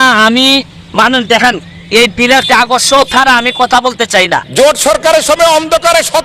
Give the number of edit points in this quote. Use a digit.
1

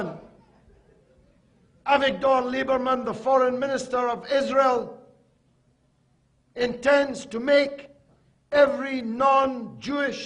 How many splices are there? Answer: 0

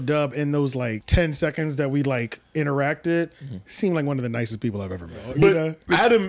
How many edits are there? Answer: 2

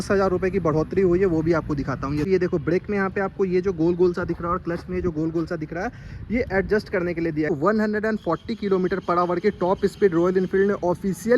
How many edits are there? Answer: 2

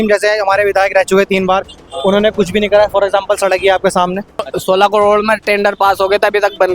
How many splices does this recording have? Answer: 1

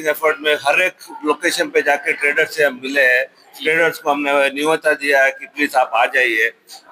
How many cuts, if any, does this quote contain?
0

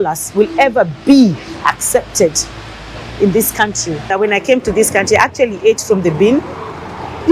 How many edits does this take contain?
1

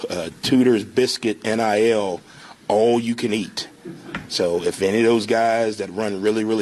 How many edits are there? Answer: 0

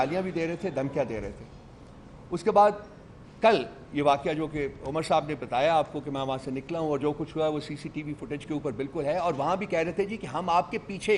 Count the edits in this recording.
0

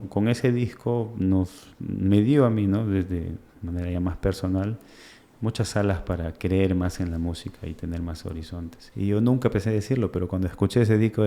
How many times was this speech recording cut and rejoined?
1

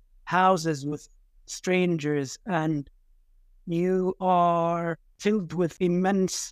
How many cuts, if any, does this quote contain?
2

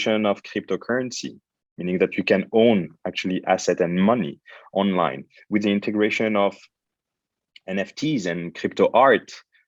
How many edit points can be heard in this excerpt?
0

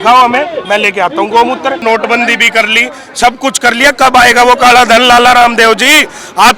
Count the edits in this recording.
1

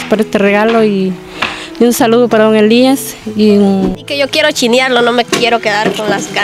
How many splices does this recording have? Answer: 1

